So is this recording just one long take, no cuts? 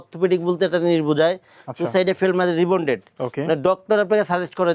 yes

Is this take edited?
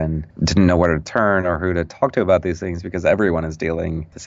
no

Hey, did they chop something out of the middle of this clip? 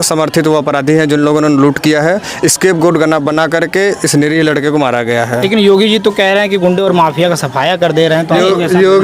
no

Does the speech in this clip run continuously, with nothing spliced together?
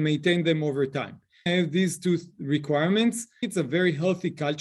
no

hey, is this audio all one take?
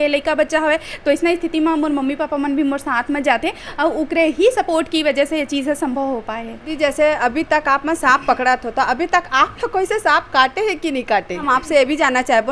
no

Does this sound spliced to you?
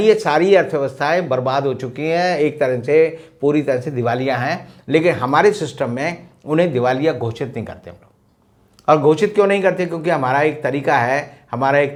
no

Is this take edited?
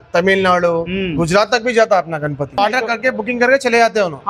yes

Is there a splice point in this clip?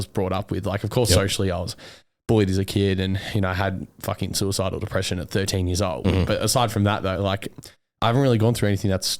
no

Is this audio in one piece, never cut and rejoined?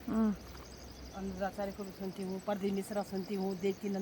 yes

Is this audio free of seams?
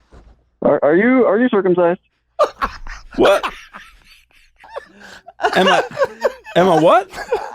no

